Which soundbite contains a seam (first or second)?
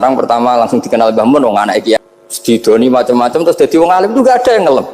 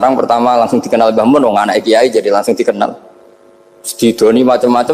first